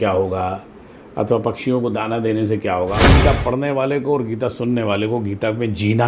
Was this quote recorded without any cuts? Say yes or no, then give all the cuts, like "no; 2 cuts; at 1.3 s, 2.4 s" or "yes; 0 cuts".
no; 1 cut; at 3.1 s